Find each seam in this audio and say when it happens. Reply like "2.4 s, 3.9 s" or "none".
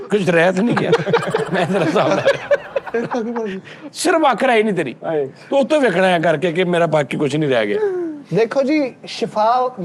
none